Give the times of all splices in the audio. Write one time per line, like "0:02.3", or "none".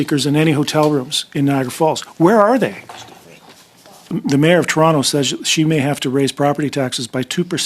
0:04.1